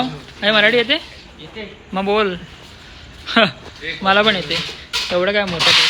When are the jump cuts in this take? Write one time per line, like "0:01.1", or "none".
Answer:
none